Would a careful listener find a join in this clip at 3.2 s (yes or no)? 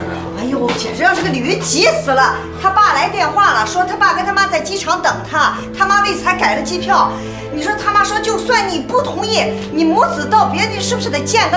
no